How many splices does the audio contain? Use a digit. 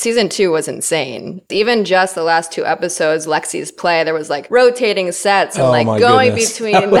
3